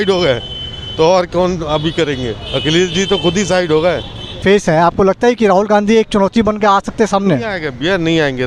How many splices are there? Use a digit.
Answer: 1